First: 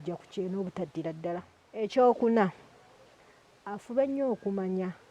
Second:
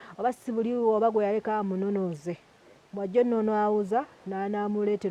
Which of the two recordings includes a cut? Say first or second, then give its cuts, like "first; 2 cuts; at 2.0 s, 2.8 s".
first; 1 cut; at 1.6 s